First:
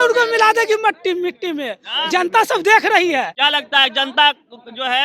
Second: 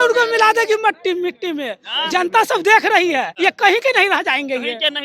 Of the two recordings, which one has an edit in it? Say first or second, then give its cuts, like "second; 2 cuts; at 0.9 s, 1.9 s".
second; 1 cut; at 3.3 s